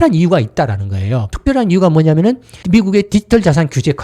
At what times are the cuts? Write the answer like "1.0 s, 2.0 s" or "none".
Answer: 1.2 s

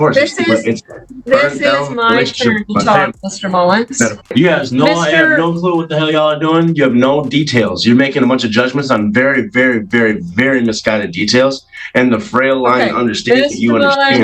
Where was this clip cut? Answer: 4.3 s

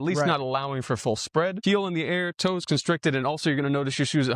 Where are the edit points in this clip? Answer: 1.6 s

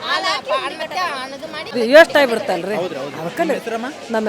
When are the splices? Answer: 1.7 s

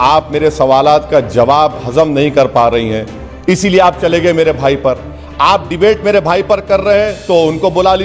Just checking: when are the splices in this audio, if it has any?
none

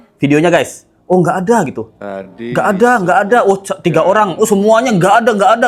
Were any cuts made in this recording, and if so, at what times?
none

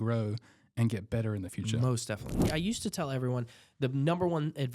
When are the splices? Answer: 2.4 s

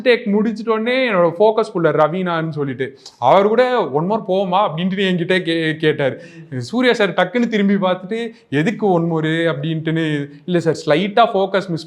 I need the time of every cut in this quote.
none

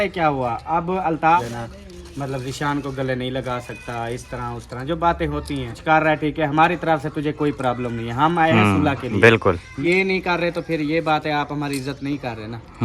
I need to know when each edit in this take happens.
1.4 s, 5.8 s, 9.8 s

